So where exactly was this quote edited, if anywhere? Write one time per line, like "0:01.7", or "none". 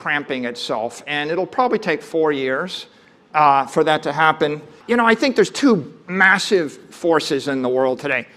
0:04.8